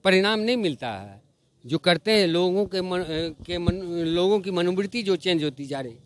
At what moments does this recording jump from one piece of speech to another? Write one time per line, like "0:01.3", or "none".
none